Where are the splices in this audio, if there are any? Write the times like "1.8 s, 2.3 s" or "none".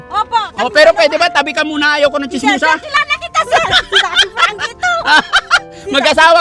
none

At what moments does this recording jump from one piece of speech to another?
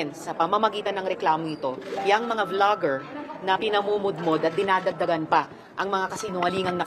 none

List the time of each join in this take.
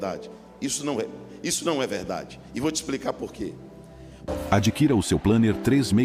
4.3 s

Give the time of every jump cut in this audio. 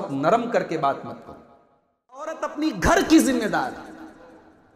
2.3 s

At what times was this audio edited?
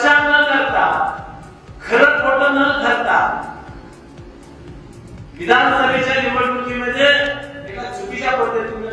none

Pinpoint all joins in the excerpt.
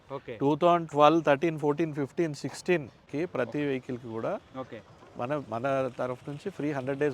3.0 s

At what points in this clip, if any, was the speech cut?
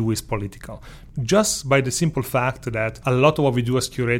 1.0 s, 3.0 s

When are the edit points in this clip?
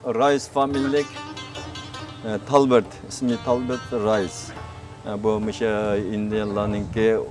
3.4 s

